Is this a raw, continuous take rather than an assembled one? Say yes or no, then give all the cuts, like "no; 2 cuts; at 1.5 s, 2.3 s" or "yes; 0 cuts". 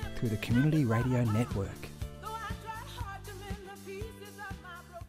no; 1 cut; at 1.6 s